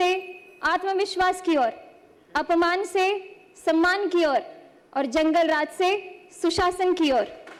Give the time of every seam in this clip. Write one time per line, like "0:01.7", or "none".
none